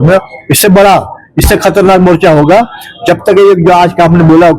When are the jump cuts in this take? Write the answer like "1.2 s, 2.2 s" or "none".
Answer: none